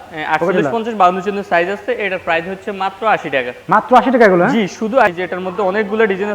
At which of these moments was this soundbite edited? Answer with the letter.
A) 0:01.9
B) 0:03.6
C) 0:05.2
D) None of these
C